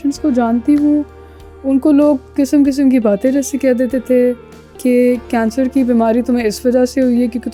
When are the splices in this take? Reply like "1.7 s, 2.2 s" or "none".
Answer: none